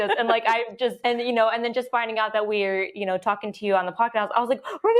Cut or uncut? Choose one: cut